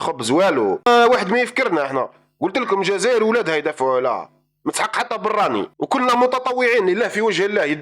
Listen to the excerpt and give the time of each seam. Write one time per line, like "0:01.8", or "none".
0:00.9
0:05.7